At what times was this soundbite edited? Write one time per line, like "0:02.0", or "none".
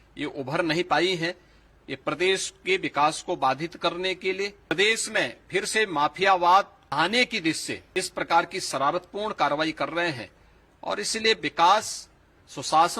0:04.7
0:06.8
0:07.7